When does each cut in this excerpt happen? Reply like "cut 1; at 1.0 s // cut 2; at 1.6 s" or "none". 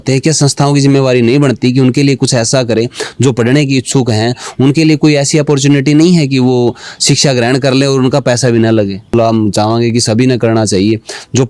cut 1; at 9.1 s

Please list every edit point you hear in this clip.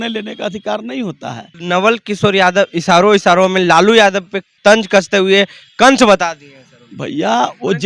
cut 1; at 1.5 s // cut 2; at 4.5 s

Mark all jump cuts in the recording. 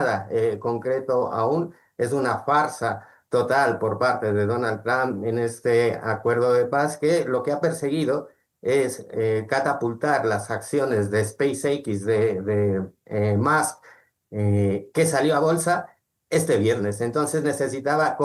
none

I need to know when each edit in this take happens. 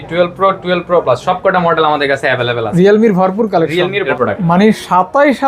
cut 1; at 4.1 s

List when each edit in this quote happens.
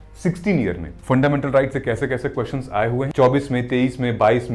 cut 1; at 0.9 s // cut 2; at 3.1 s

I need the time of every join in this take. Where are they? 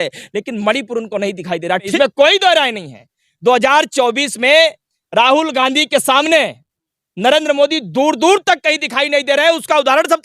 cut 1; at 1.9 s

